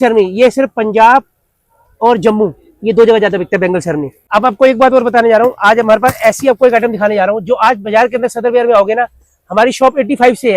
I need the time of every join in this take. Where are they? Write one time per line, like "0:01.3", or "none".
0:04.2